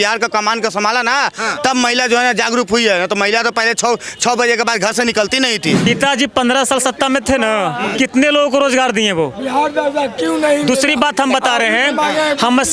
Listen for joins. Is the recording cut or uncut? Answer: cut